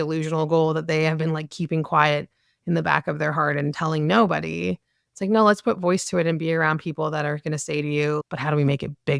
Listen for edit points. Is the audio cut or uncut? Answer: cut